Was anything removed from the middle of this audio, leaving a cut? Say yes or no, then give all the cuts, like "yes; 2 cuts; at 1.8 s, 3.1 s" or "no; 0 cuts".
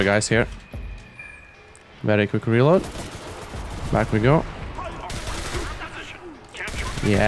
no; 0 cuts